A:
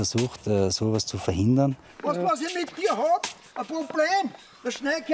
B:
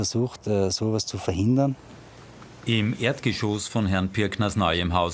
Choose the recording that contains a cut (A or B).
A